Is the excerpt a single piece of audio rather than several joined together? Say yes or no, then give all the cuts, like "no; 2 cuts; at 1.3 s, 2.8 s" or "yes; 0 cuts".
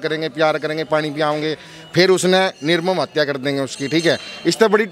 yes; 0 cuts